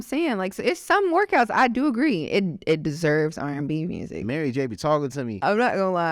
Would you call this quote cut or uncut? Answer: cut